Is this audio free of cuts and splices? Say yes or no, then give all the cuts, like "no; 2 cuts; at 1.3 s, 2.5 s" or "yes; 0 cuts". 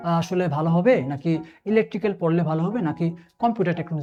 yes; 0 cuts